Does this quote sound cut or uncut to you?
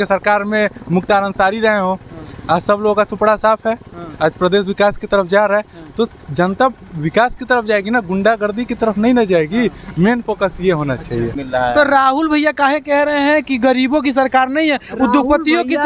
cut